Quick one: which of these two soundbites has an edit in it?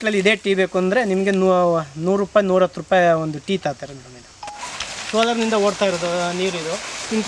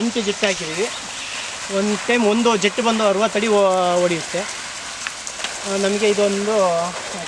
first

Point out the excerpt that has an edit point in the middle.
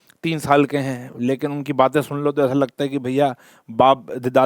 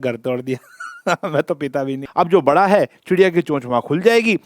second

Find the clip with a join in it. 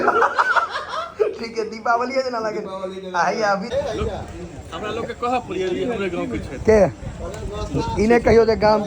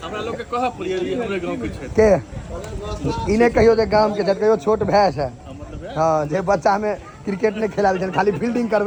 first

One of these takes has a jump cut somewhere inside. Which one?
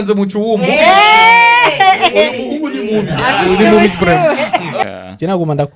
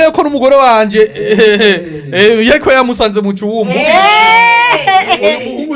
first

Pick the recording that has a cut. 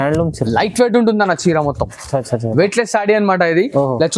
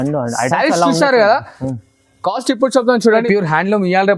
second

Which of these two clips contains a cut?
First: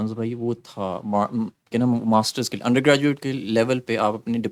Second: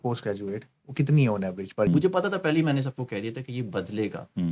second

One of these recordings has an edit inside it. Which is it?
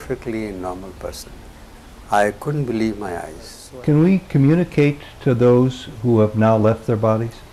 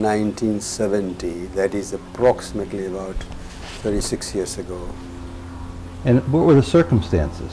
first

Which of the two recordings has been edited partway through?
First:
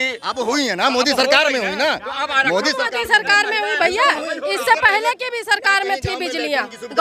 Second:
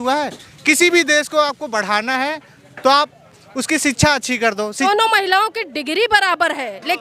second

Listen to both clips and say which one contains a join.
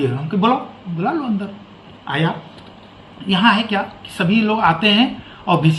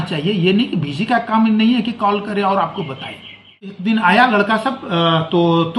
second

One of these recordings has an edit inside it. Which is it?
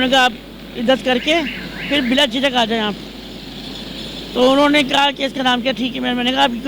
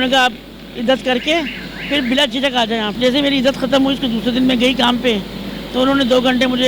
second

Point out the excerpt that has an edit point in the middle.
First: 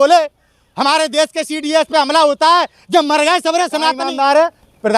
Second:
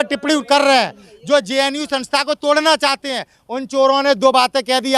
first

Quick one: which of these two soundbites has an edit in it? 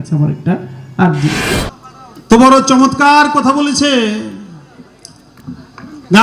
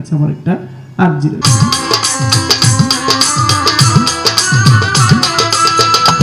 first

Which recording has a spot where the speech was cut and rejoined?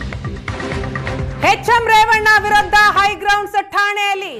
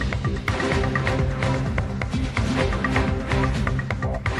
second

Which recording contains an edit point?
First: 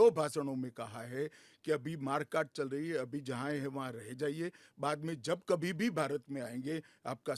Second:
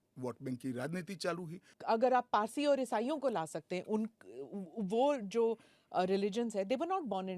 second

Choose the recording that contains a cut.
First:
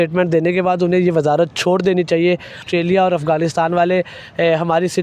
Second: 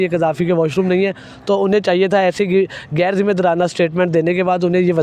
first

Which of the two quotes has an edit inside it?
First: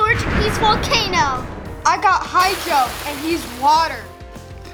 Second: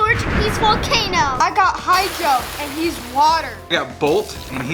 second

